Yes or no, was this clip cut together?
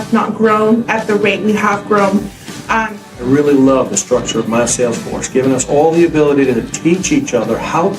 yes